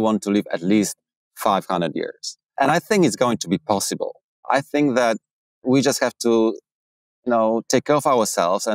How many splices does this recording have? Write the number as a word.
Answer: two